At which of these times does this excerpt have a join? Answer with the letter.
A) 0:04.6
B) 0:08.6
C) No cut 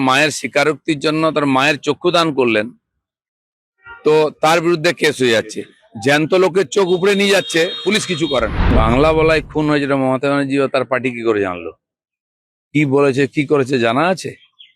B